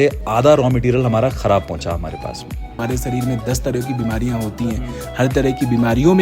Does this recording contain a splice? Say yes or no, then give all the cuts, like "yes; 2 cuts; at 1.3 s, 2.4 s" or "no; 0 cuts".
yes; 1 cut; at 2.8 s